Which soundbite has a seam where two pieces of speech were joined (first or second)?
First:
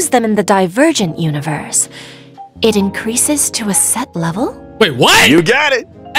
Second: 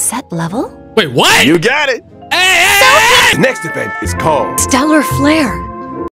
second